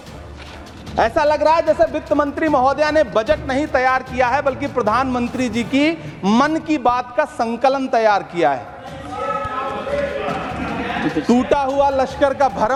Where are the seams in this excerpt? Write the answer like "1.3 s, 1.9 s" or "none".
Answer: none

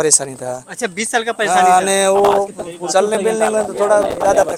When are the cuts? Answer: none

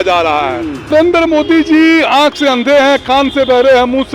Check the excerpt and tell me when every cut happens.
0.9 s

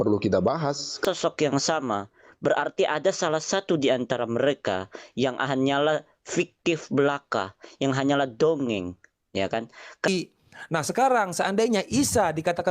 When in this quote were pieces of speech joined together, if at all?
1.0 s, 10.1 s

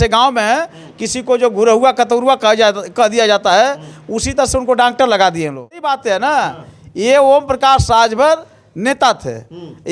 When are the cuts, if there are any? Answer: 5.9 s

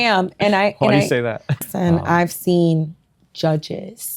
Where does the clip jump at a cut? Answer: 1.6 s

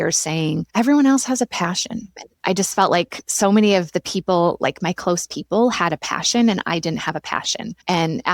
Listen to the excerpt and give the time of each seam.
2.1 s

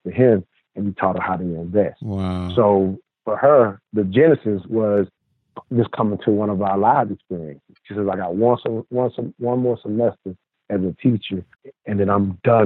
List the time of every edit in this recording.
7.8 s, 11.6 s

